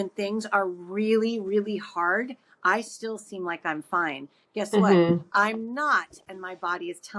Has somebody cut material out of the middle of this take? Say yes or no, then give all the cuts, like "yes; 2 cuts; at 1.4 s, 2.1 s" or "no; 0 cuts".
no; 0 cuts